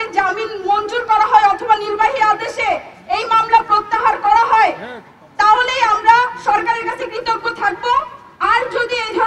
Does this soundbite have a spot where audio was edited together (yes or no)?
no